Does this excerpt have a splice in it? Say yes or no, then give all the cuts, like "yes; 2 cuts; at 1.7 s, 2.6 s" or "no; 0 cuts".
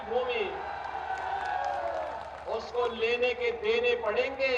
no; 0 cuts